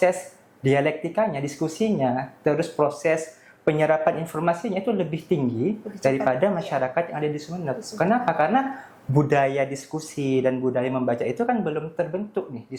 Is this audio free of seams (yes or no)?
yes